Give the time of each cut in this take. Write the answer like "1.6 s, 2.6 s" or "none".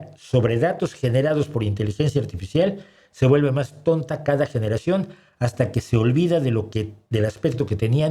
none